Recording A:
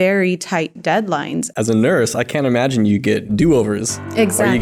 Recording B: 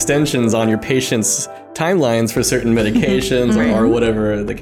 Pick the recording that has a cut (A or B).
A